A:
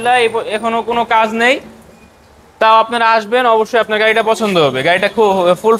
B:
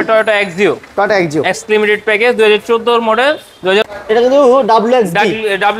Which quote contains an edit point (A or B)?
B